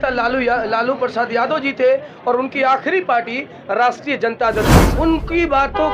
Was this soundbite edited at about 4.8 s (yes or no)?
yes